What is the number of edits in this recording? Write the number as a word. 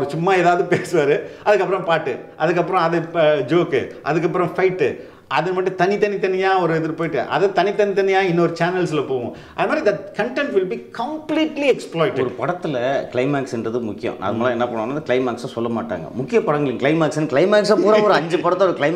zero